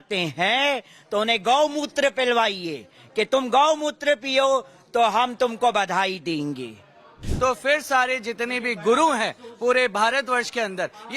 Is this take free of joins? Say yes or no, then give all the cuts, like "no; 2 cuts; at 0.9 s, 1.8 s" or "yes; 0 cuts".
no; 1 cut; at 7.2 s